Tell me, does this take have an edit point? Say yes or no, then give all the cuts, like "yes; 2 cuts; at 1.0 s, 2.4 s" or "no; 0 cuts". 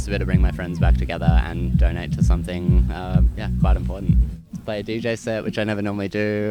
yes; 1 cut; at 4.4 s